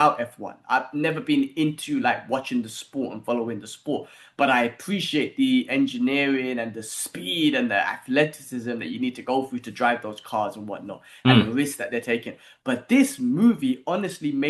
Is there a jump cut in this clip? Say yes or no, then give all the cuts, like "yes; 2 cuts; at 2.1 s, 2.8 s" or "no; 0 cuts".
no; 0 cuts